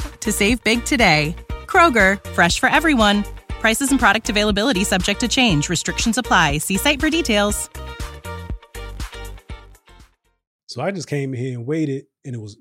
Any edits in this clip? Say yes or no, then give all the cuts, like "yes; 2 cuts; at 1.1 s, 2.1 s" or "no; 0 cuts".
yes; 1 cut; at 10.4 s